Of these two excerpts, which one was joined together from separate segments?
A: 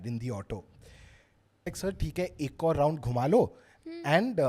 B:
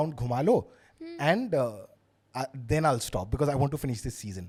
A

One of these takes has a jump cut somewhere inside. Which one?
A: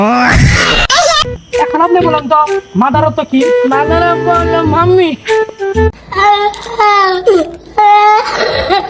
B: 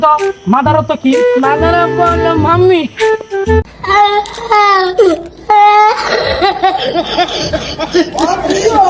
A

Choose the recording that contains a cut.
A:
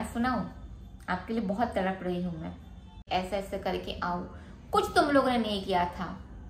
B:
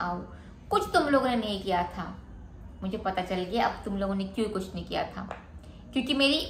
A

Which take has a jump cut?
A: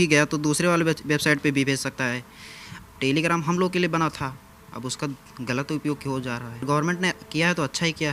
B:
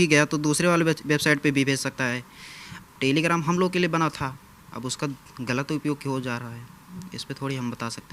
A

